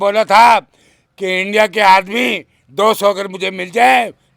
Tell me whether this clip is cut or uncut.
uncut